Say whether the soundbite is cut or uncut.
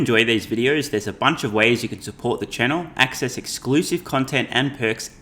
uncut